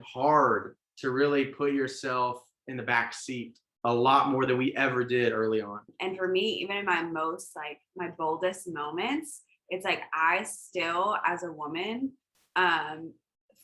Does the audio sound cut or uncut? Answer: cut